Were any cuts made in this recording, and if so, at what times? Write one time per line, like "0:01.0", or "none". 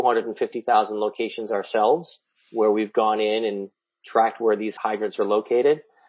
0:04.7